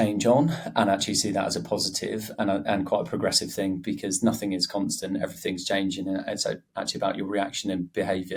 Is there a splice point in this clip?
no; 0 cuts

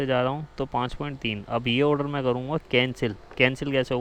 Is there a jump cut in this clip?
no; 0 cuts

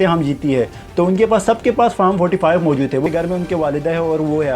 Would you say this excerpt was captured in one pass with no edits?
no; 1 cut; at 3.1 s

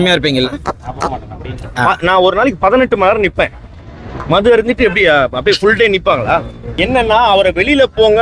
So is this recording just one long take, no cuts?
no; 1 cut; at 6.7 s

